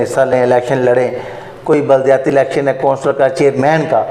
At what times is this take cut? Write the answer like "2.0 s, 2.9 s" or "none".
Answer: none